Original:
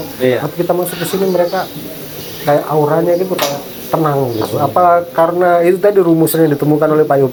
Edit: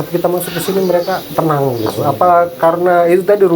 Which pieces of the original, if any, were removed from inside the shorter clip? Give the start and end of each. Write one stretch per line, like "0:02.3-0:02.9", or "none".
0:01.7-0:03.8